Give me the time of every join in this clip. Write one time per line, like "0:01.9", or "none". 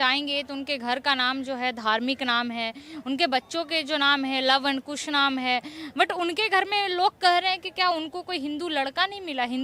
none